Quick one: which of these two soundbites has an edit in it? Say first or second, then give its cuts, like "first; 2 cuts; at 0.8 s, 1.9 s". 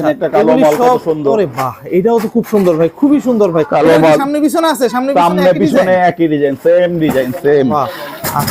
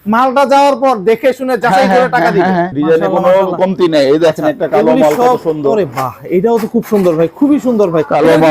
second; 1 cut; at 2.7 s